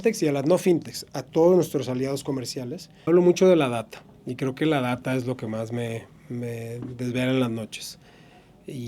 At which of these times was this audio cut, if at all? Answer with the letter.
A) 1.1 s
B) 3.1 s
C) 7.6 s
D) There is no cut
B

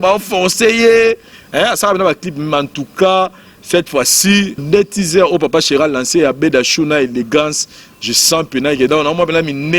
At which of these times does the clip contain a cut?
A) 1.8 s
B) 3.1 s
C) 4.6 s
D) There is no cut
C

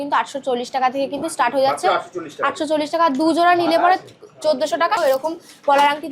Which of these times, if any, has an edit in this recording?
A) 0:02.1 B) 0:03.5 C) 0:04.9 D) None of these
C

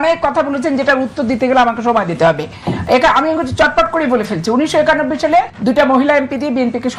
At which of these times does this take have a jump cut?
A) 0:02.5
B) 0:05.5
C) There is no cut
B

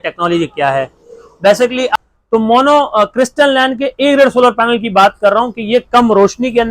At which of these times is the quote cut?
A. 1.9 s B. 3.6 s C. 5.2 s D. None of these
A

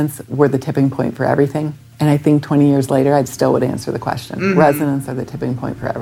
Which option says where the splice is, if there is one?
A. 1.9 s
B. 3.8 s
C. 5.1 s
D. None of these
D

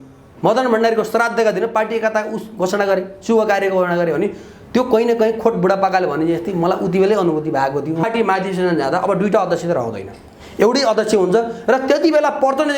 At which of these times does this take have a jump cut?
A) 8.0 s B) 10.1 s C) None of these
A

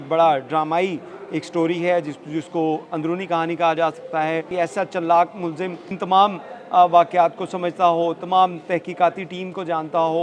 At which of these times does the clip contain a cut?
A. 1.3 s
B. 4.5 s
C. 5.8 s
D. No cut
B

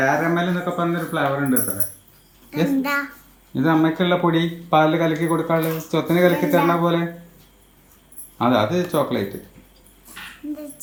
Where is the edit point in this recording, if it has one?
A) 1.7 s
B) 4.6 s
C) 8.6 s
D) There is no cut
D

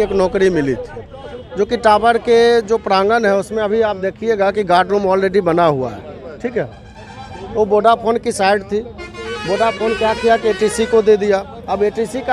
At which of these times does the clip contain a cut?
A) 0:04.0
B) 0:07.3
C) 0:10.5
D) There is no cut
D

